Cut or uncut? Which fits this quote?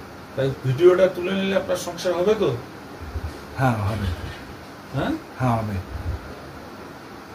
uncut